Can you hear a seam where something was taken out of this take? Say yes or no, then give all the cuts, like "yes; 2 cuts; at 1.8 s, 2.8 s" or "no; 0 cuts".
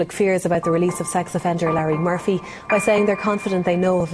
no; 0 cuts